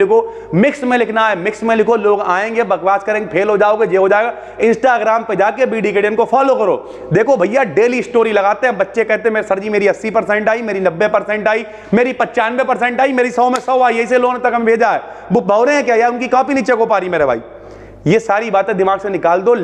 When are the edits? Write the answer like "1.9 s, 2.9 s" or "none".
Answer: none